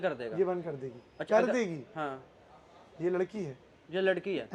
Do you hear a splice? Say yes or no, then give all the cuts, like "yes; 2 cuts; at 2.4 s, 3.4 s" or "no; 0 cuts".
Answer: no; 0 cuts